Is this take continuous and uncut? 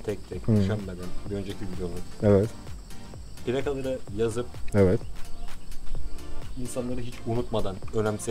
yes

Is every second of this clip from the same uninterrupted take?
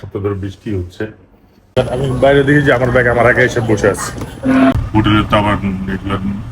no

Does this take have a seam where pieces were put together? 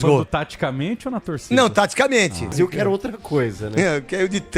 yes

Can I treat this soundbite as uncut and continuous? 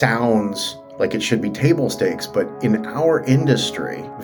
yes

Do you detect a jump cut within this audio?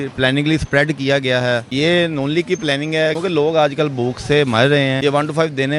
yes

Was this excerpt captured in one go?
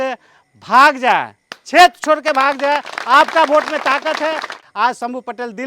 no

